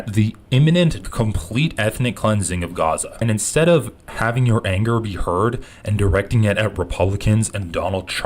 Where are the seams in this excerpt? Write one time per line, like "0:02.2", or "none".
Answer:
0:01.1
0:03.2